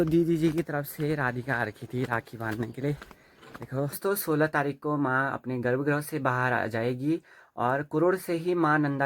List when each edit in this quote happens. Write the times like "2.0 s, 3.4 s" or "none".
4.0 s